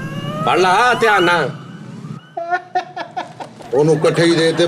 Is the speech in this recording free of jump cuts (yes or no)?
yes